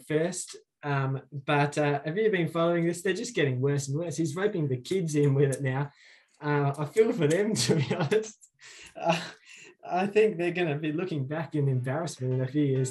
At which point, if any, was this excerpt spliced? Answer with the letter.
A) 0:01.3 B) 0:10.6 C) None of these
C